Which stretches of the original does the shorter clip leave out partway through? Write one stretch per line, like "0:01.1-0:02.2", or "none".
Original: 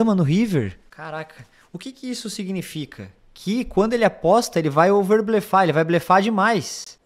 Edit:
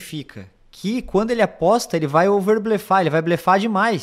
none